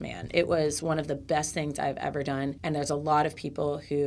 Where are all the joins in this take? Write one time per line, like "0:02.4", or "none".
0:02.6